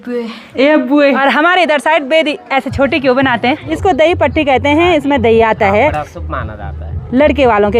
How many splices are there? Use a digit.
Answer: 2